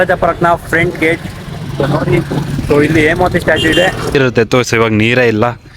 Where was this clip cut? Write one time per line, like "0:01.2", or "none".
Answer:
0:04.1